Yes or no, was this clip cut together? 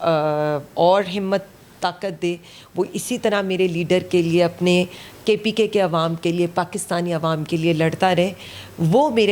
no